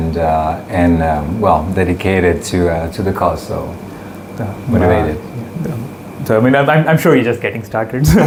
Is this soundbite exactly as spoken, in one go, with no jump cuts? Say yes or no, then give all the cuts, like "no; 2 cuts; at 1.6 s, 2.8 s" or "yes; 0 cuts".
yes; 0 cuts